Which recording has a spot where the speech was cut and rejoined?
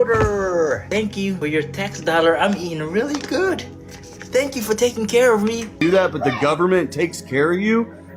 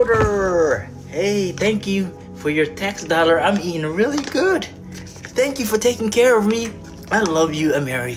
first; 2 cuts; at 1.1 s, 5.7 s

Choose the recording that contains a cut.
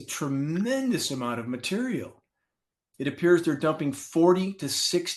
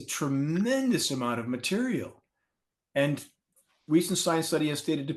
first; 1 cut; at 2.8 s

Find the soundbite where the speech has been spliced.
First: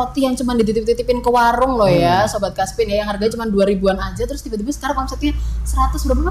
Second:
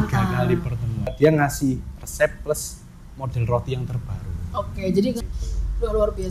second; 2 cuts; at 1.1 s, 5.2 s

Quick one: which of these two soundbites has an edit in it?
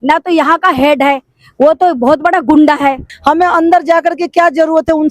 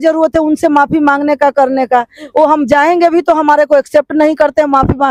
first; 1 cut; at 3.1 s

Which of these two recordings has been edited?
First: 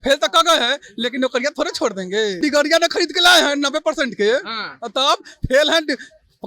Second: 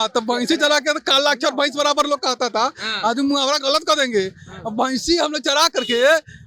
first; 1 cut; at 2.4 s

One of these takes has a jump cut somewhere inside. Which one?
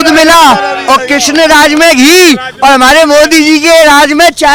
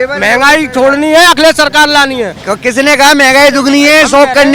second; 1 cut; at 2.3 s

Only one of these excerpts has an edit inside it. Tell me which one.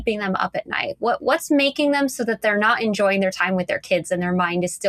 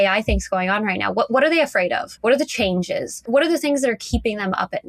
second; 2 cuts; at 2.1 s, 3.3 s

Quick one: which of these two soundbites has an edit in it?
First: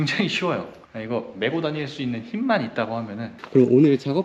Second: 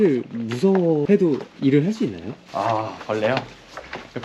first; 1 cut; at 3.4 s

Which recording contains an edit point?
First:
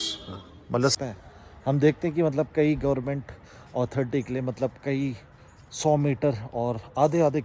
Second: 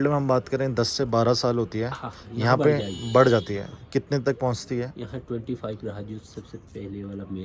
first; 1 cut; at 0.9 s

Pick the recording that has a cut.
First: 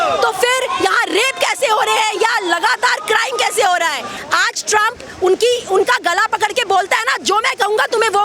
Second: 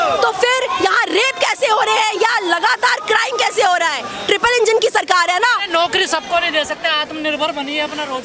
first; 1 cut; at 4.1 s

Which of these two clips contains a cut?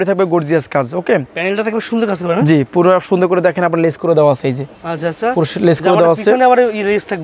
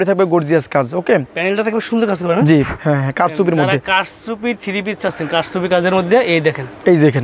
second; 1 cut; at 2.7 s

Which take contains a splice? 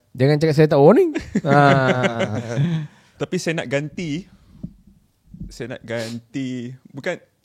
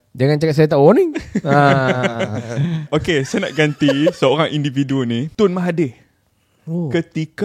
second; 2 cuts; at 2.9 s, 5.3 s

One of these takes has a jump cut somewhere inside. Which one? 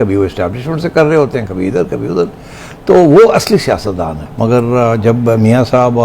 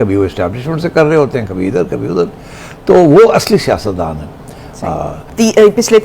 first; 1 cut; at 4.2 s

